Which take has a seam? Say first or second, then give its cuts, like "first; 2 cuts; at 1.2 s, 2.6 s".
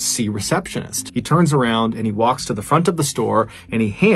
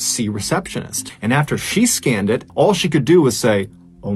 second; 2 cuts; at 1.1 s, 2.5 s